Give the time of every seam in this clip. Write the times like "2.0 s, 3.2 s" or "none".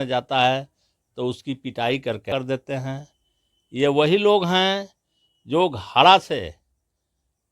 2.3 s